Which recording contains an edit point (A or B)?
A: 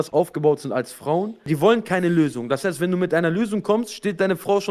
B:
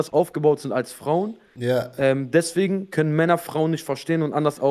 A